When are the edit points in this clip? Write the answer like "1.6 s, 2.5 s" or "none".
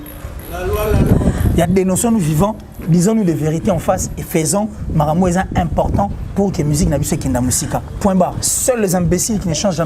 8.4 s